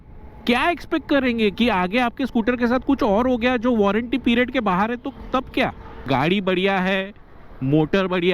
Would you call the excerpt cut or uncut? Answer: cut